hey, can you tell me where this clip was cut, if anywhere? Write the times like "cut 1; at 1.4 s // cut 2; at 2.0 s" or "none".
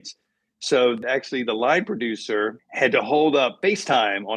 cut 1; at 1.0 s